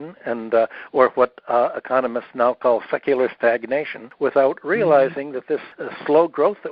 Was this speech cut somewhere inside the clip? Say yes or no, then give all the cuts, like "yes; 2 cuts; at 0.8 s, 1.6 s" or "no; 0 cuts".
yes; 2 cuts; at 4.0 s, 5.7 s